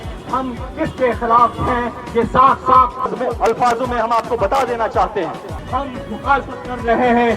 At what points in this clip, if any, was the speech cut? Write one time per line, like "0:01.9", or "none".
0:05.6